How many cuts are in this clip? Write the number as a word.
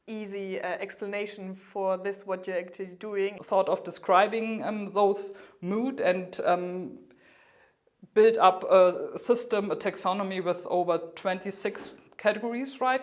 one